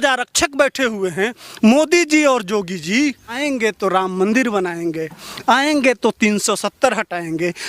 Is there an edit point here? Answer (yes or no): yes